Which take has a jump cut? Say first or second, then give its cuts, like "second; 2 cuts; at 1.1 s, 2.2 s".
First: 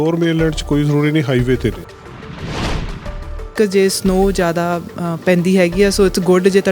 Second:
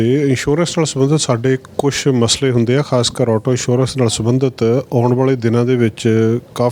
first; 2 cuts; at 1.8 s, 3.5 s